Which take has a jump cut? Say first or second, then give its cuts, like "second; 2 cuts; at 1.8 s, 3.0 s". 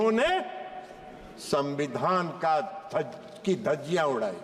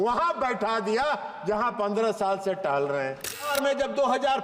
second; 1 cut; at 3.5 s